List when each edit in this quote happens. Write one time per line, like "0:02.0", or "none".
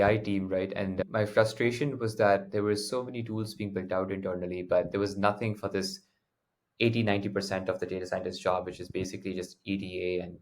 0:01.0